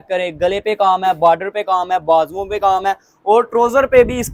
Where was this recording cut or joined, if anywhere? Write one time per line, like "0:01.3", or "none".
none